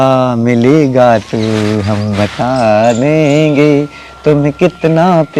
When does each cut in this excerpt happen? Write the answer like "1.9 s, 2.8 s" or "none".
none